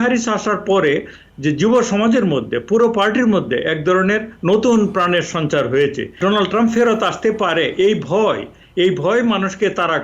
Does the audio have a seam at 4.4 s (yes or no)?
no